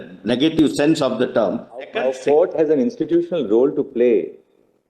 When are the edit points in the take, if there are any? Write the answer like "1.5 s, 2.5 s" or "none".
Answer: 1.9 s